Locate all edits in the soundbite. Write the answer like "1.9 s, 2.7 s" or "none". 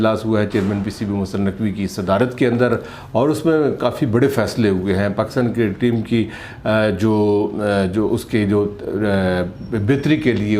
none